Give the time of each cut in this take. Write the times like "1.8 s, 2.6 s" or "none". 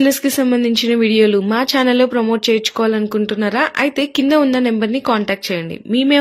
none